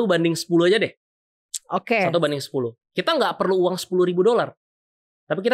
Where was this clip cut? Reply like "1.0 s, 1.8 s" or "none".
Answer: none

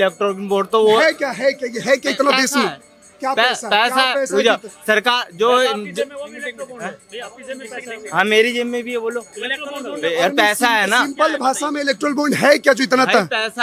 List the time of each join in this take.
none

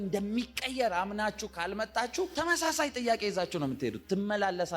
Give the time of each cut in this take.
2.3 s

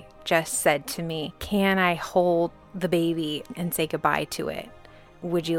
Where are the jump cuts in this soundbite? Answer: 1.4 s, 2.6 s, 3.5 s

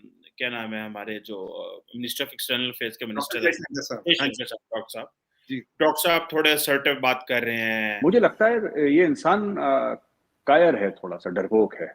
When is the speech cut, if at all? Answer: 7.8 s

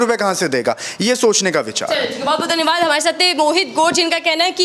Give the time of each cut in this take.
none

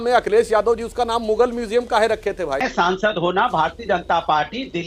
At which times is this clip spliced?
2.7 s

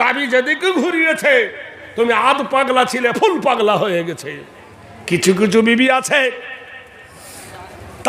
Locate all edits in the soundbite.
5.1 s

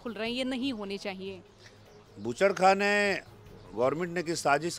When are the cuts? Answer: none

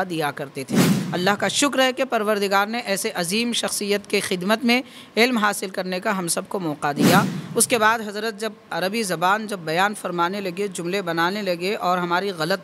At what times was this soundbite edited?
0.9 s, 7.4 s

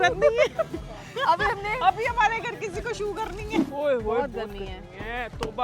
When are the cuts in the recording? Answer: 3.7 s

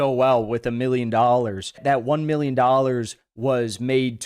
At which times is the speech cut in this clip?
1.8 s

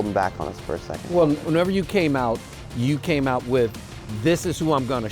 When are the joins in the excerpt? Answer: 1.4 s

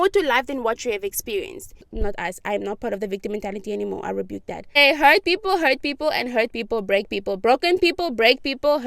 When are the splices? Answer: 1.8 s, 4.8 s

